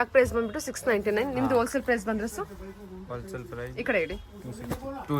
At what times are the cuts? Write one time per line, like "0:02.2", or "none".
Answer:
none